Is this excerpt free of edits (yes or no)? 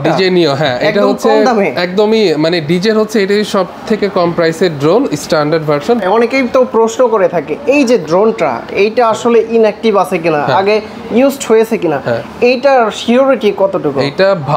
no